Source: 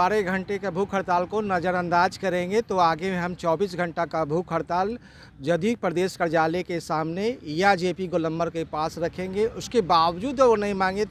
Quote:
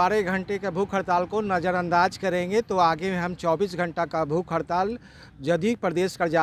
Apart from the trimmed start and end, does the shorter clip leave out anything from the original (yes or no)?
no